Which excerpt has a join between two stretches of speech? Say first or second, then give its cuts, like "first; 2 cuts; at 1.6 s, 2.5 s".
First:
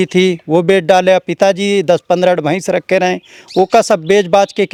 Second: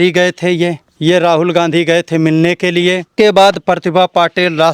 second; 2 cuts; at 0.9 s, 3.1 s